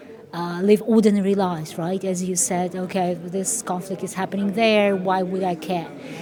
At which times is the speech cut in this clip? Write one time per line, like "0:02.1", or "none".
none